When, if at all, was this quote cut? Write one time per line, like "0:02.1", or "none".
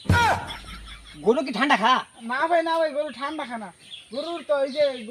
none